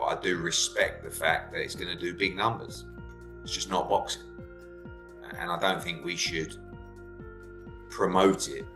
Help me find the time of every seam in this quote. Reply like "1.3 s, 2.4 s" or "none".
6.5 s, 7.9 s